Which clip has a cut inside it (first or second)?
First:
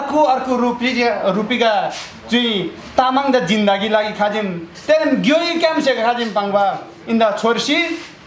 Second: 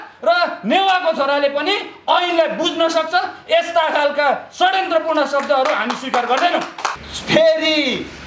second